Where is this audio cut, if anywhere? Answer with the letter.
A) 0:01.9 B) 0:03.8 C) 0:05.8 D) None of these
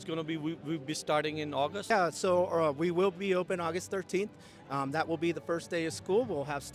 A